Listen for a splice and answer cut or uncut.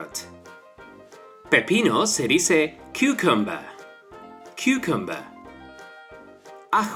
uncut